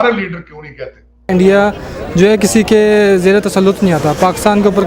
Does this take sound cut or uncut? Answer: cut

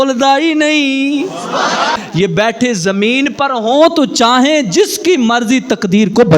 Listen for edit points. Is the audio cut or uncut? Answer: cut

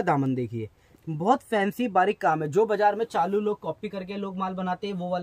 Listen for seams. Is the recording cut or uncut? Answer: uncut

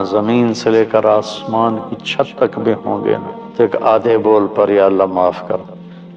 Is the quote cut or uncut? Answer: cut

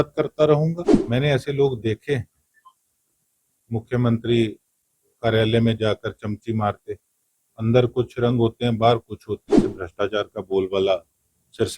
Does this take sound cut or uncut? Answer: cut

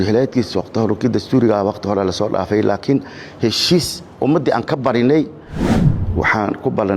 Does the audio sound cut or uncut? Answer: cut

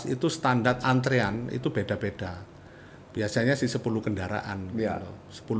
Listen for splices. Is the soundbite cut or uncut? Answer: uncut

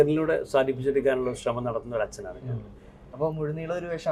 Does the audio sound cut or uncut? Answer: uncut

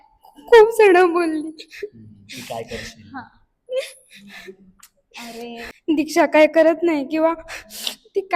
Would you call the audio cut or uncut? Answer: cut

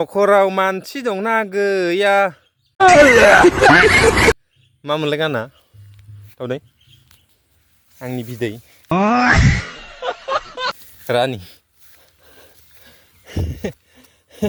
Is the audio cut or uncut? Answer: uncut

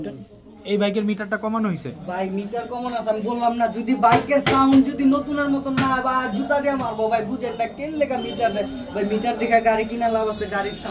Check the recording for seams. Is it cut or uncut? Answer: uncut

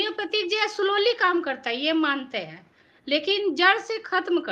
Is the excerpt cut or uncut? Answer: uncut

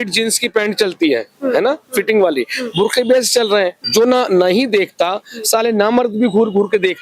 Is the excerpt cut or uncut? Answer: cut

